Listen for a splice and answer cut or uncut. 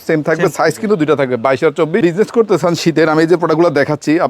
cut